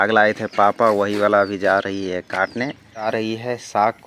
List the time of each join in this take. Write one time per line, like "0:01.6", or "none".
0:03.1

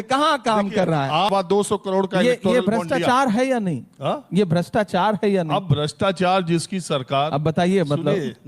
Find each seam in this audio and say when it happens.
0:01.3

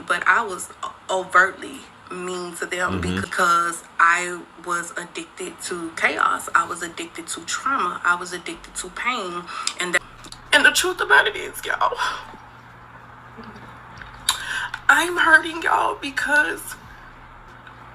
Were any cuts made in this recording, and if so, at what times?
0:03.2
0:10.1

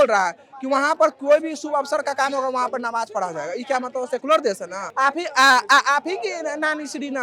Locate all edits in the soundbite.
0:04.8

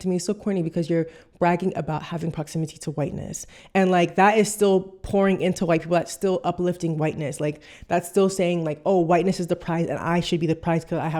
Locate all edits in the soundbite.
none

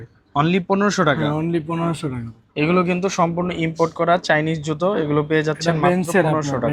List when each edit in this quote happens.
none

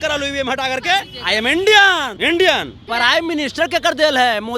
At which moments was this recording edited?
0:01.1
0:02.1
0:02.8

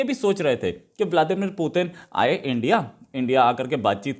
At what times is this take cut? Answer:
none

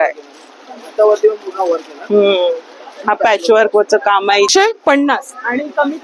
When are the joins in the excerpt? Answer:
0:04.5

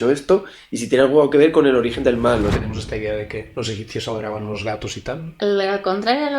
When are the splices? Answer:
0:02.6
0:03.5
0:05.3

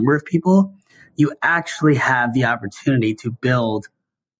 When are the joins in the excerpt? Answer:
none

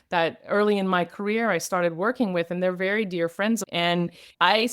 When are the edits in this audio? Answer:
0:03.7

